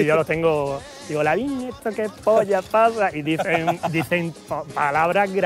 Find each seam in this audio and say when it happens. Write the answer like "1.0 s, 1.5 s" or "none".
none